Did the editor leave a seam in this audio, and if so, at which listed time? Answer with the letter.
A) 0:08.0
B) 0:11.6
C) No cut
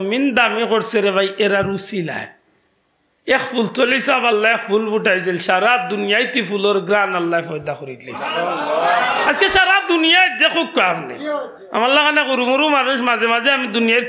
C